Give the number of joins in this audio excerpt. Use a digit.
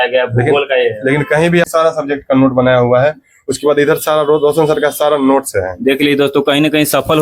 1